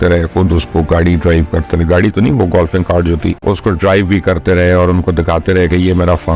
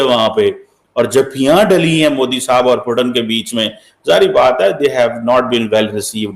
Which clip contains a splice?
first; 1 cut; at 3.4 s

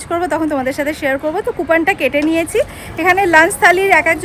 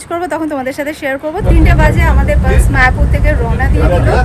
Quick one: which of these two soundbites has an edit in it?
second; 1 cut; at 1.4 s

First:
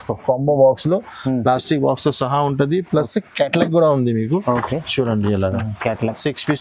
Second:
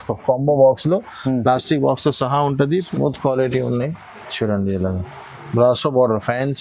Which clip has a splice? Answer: second; 1 cut; at 2.9 s

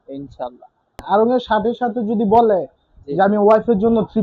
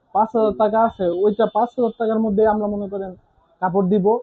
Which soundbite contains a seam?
first; 1 cut; at 1.0 s

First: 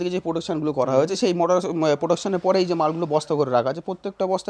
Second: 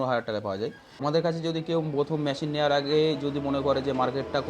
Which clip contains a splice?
second; 1 cut; at 1.0 s

